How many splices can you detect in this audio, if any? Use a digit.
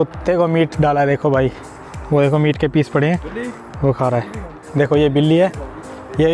1